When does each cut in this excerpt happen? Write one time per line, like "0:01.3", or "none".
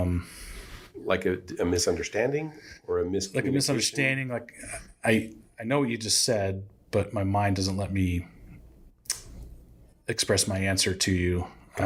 none

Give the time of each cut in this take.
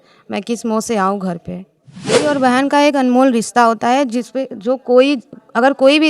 0:02.3

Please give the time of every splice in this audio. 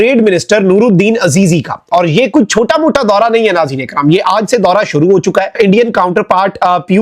0:05.6

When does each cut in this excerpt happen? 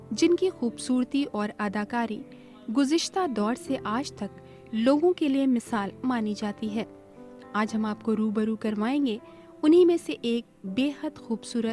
none

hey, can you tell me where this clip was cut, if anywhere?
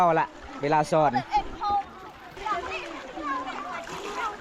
0:02.4

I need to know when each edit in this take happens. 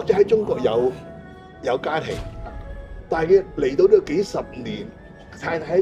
none

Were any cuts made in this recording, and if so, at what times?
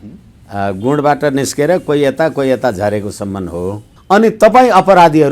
0:03.9

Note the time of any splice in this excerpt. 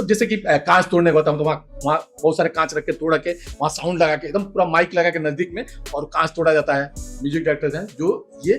0:07.1

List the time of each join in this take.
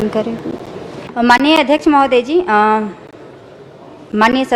0:00.9

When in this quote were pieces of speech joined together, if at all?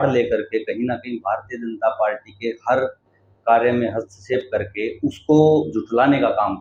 none

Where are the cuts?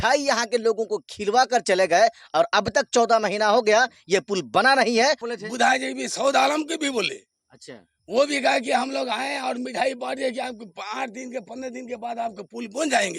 0:05.3

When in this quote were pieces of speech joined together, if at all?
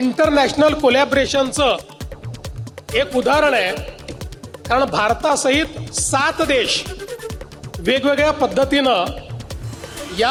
none

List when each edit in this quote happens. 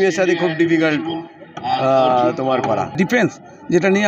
0:02.9

